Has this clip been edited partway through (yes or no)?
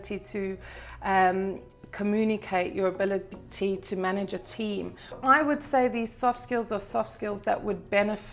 yes